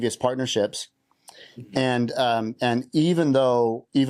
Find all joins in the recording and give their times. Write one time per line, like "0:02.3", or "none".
none